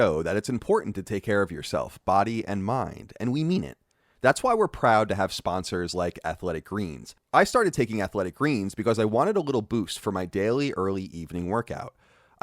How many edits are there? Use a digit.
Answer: 1